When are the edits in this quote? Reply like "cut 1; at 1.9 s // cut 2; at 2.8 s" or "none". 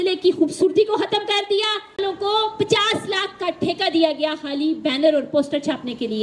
cut 1; at 2.0 s